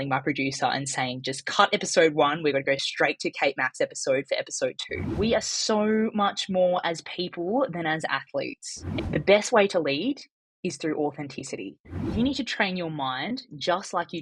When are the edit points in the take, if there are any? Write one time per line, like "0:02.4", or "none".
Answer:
0:05.1
0:09.0
0:12.0